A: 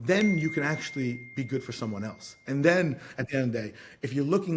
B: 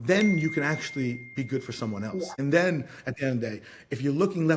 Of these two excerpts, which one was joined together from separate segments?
B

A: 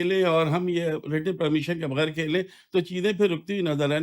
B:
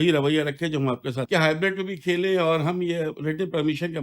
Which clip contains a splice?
B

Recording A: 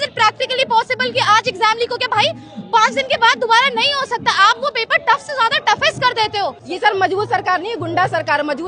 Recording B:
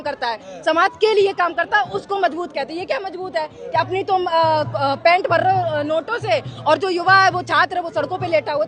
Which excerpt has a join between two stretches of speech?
A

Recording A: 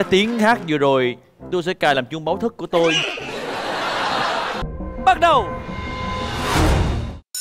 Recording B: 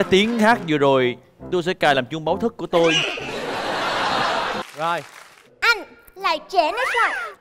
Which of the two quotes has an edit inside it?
B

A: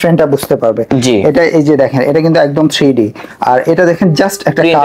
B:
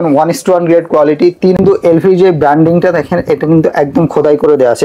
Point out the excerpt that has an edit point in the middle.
B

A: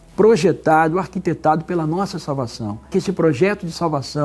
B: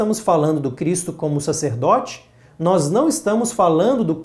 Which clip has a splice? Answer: A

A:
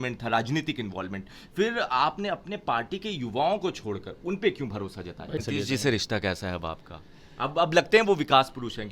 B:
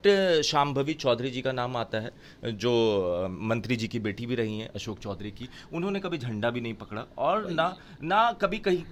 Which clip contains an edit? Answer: A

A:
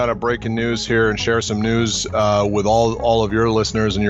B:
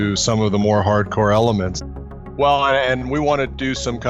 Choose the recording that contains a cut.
B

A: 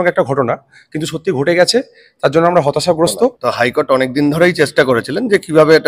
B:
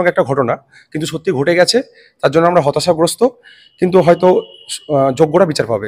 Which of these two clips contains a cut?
A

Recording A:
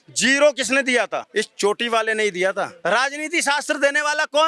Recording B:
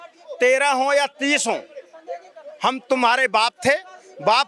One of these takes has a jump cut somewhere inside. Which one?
A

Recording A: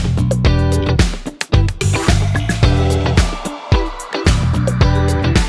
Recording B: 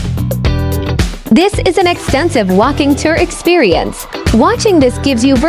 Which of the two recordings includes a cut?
B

